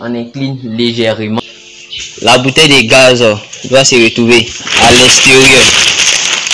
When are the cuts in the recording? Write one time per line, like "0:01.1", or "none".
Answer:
0:01.6